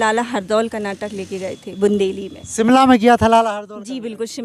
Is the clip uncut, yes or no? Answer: yes